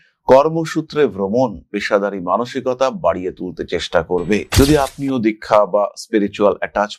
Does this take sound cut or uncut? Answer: cut